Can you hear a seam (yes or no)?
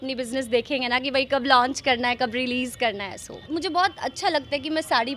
yes